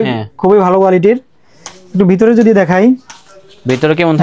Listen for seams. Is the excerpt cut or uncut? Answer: uncut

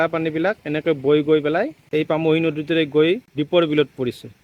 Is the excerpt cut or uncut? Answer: uncut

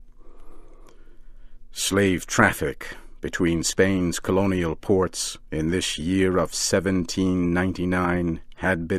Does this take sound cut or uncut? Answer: cut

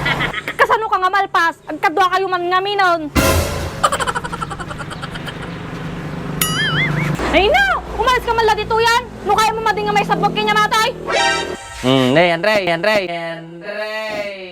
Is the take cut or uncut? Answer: cut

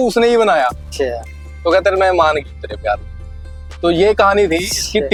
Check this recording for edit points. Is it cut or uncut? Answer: uncut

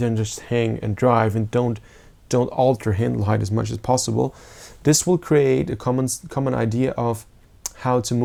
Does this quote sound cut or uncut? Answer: uncut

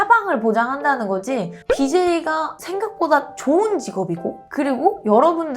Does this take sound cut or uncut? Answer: cut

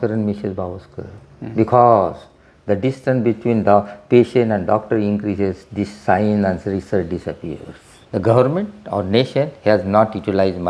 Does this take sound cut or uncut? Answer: cut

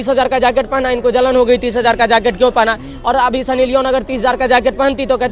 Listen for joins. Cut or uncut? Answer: uncut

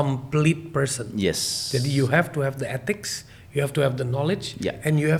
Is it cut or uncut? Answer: uncut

